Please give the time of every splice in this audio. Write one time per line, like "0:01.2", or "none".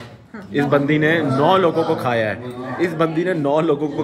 none